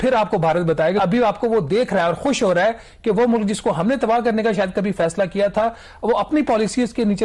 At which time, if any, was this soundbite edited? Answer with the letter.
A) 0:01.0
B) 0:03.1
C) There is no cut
A